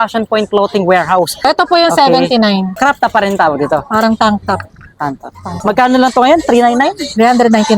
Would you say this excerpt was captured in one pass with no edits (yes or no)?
no